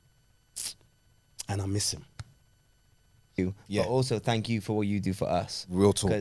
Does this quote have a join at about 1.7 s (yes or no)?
no